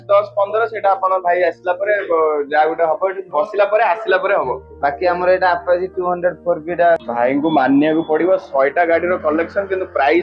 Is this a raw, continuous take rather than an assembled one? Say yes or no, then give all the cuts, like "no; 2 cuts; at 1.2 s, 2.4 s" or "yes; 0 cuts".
no; 1 cut; at 7.1 s